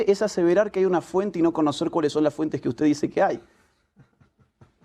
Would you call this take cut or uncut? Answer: cut